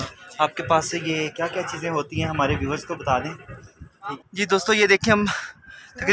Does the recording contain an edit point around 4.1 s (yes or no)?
yes